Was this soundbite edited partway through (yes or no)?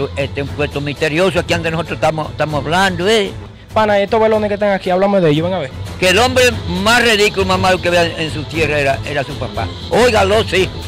yes